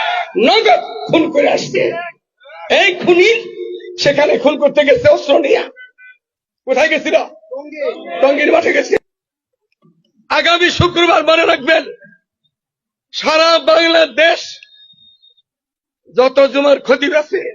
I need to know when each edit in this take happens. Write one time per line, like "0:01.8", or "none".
0:09.0